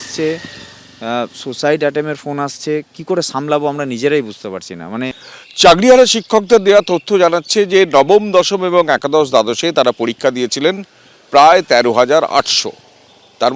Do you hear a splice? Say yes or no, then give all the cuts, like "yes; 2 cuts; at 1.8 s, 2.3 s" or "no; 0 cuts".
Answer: yes; 1 cut; at 5.2 s